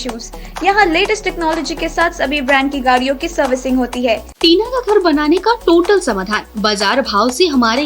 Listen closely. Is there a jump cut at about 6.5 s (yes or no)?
no